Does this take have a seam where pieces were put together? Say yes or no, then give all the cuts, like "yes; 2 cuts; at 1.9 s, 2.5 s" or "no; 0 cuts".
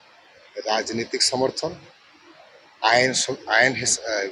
no; 0 cuts